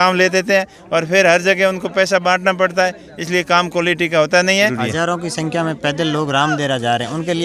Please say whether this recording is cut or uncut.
cut